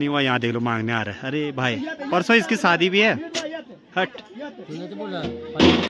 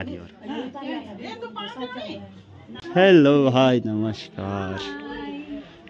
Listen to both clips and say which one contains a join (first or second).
second